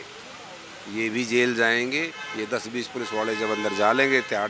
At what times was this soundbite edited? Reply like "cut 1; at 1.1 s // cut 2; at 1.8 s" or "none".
cut 1; at 2.2 s